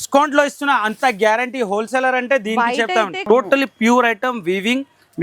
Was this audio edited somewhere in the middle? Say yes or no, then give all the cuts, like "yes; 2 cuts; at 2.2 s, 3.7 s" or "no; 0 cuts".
yes; 1 cut; at 3.2 s